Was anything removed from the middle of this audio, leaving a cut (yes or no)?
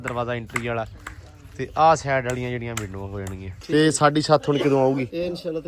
yes